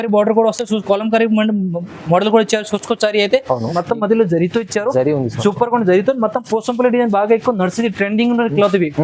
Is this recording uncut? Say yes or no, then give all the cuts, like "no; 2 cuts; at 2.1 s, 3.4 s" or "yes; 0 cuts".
no; 1 cut; at 3.8 s